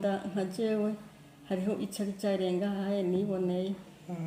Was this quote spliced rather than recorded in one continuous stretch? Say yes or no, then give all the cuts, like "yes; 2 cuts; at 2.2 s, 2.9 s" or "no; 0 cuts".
no; 0 cuts